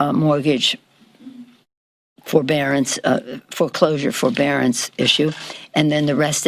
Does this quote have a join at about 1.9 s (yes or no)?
no